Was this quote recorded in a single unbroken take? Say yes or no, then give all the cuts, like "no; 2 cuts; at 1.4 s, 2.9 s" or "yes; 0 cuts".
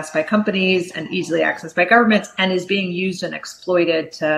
yes; 0 cuts